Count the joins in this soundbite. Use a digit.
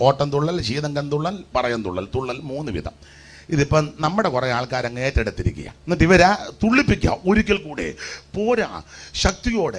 1